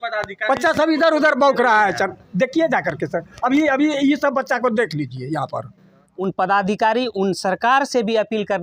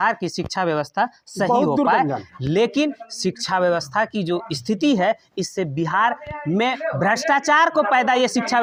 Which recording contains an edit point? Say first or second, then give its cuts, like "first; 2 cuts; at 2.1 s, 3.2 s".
first; 1 cut; at 6.1 s